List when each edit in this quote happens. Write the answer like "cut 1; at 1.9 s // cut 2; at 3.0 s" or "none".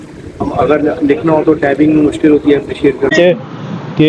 cut 1; at 3.1 s